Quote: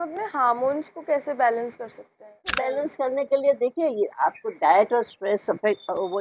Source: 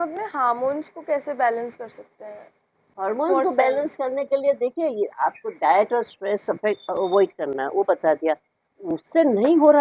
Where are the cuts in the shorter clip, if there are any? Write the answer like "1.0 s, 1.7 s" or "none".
2.7 s